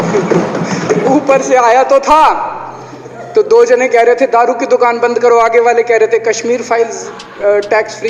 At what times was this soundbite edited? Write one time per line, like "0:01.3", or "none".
none